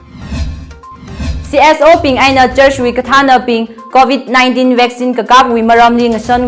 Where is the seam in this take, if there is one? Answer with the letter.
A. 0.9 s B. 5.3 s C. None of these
A